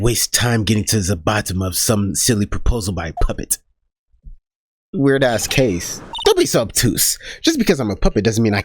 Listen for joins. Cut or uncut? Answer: cut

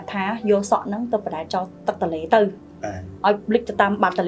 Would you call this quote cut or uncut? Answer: uncut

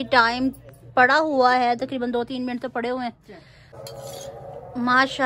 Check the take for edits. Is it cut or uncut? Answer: cut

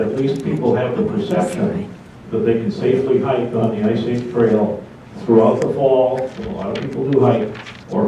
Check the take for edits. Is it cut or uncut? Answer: cut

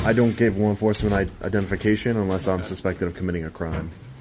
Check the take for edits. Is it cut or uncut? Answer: uncut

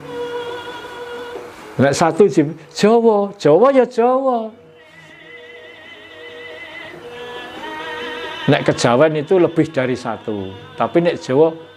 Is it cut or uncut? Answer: uncut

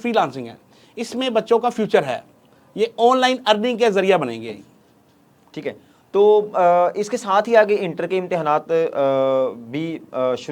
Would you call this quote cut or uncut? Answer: uncut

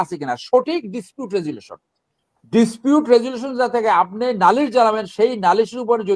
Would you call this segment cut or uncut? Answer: uncut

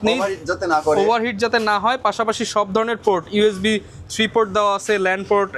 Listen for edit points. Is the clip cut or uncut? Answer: uncut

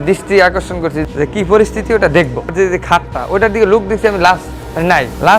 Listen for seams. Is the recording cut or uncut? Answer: cut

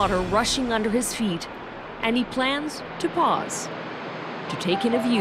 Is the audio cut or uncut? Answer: cut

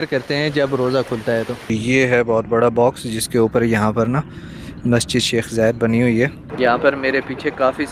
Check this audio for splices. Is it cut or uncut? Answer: cut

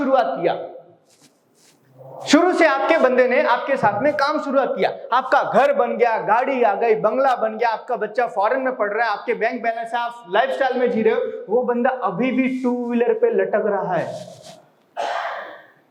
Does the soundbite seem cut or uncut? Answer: uncut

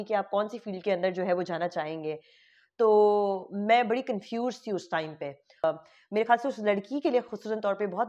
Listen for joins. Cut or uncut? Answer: cut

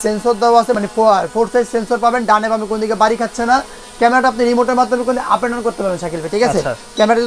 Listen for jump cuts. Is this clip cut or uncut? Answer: uncut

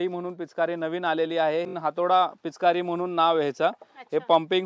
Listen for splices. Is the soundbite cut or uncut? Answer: cut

